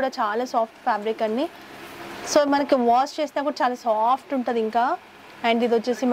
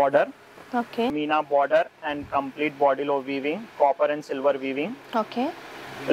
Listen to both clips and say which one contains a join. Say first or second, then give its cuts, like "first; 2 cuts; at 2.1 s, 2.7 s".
second; 1 cut; at 1.1 s